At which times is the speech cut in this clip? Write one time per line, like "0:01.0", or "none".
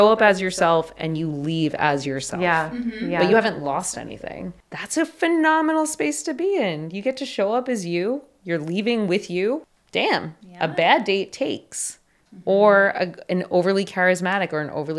0:04.6
0:09.8